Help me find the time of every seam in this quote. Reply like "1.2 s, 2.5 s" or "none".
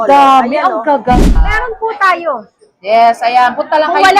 1.4 s